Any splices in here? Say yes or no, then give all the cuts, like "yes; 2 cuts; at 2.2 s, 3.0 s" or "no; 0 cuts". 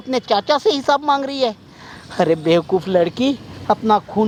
no; 0 cuts